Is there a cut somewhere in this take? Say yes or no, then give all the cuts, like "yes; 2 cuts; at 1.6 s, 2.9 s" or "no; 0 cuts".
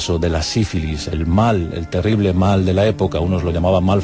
no; 0 cuts